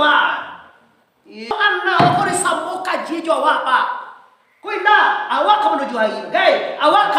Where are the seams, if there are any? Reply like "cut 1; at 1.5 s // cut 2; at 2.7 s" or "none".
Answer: cut 1; at 1.5 s